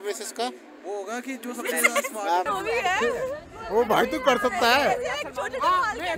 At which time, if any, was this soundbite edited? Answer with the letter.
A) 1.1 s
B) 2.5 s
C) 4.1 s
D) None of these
B